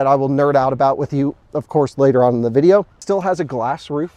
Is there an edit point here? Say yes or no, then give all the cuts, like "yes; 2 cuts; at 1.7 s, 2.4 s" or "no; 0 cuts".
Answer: yes; 1 cut; at 3.0 s